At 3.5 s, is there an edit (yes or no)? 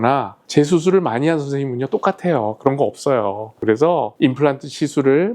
yes